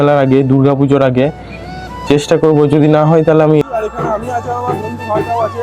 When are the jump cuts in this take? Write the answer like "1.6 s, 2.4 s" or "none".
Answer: 3.6 s